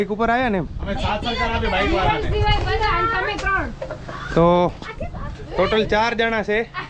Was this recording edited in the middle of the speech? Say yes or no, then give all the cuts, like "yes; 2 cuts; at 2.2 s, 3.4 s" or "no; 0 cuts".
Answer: no; 0 cuts